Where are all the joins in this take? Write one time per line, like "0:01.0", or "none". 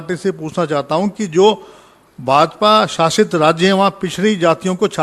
none